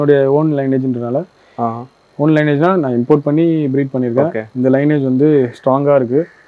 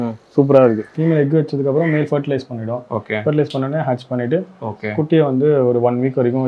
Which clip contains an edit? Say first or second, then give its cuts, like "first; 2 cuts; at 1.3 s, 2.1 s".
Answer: second; 1 cut; at 0.9 s